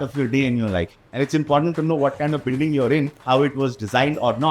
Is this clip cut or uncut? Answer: cut